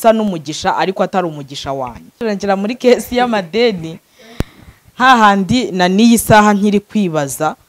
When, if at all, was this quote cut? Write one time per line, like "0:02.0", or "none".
0:02.2